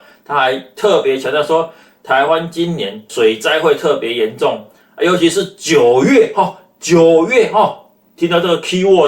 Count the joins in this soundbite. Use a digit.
1